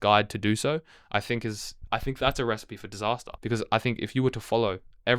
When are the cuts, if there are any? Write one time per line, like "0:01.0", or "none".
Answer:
0:01.7
0:03.3